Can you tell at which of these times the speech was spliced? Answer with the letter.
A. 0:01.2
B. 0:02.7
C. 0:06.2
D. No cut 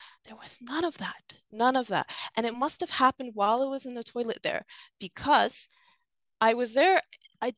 D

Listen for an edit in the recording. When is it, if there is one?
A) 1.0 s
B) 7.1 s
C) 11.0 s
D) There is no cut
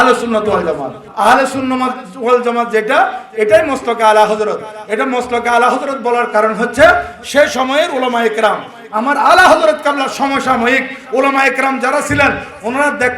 A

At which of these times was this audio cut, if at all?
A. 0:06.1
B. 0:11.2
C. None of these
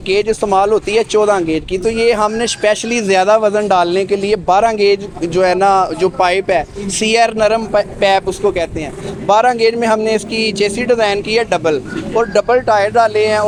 C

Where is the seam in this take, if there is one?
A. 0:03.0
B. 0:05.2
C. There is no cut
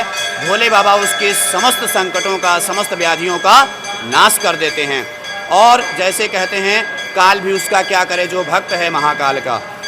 C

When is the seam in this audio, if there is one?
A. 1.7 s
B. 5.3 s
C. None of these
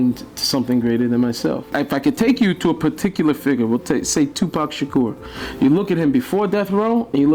A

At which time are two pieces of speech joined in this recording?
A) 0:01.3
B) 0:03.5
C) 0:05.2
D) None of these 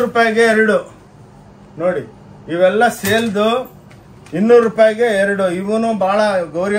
D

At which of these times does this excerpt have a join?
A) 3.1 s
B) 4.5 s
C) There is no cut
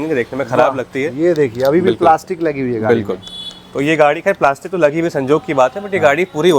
C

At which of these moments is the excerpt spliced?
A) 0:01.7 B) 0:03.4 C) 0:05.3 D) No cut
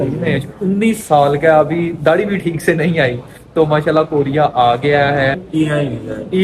C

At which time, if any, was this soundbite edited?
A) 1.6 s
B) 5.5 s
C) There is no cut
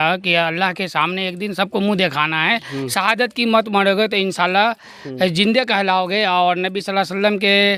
C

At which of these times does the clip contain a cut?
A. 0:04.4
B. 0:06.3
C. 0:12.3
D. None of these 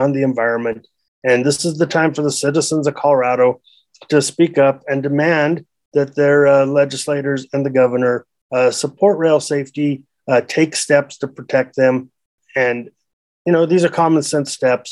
C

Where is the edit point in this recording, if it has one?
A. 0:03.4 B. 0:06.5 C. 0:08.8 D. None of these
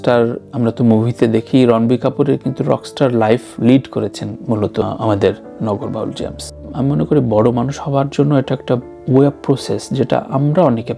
B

